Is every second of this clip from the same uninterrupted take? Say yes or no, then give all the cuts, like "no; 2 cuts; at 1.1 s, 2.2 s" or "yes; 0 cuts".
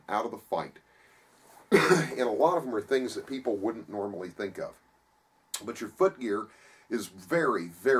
no; 1 cut; at 6.2 s